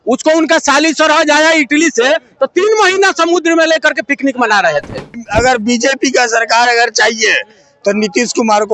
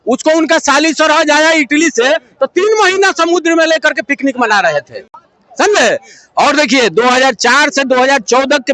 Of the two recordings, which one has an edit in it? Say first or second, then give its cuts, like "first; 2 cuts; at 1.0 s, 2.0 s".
first; 1 cut; at 5.1 s